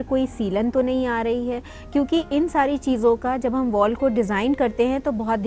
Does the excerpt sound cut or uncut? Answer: uncut